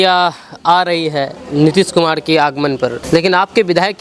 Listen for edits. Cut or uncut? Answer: cut